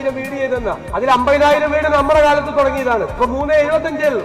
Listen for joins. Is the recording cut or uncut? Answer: cut